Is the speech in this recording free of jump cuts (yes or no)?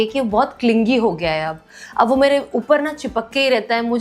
yes